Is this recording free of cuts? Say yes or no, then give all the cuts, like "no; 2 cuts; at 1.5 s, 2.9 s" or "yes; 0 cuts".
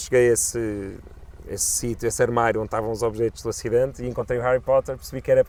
yes; 0 cuts